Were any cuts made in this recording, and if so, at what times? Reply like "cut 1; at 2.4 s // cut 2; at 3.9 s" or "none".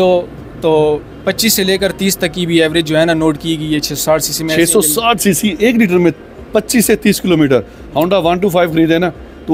none